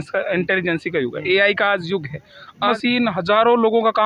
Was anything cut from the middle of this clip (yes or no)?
yes